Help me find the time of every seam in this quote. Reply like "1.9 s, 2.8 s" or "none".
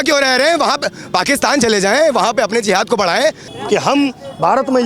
3.5 s